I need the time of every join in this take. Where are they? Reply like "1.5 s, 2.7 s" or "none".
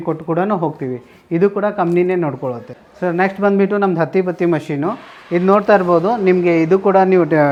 none